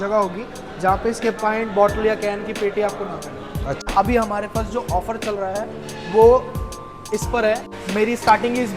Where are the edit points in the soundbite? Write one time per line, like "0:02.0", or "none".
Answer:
0:03.8
0:07.8